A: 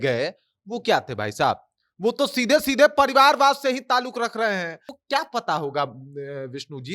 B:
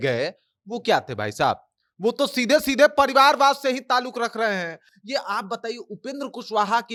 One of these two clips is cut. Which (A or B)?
A